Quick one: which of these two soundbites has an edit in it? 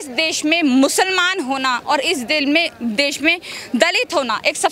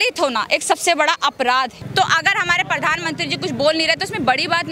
second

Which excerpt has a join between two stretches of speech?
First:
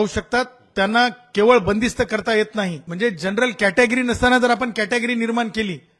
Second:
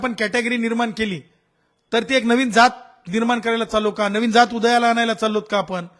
first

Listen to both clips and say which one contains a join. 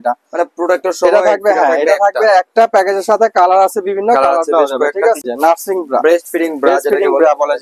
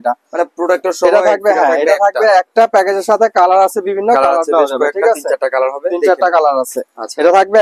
first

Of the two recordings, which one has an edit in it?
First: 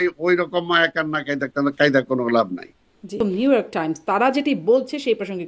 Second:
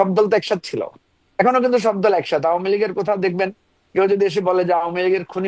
first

